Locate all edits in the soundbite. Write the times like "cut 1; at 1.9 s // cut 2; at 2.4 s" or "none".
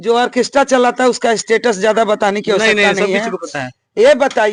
none